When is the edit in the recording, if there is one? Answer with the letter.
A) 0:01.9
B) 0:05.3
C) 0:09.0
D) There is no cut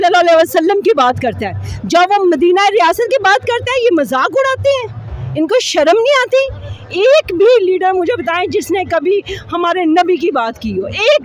D